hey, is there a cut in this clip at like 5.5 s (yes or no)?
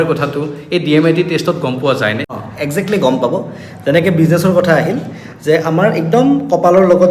no